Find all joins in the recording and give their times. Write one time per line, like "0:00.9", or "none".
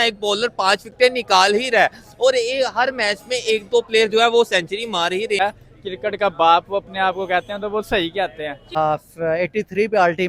0:05.4
0:08.8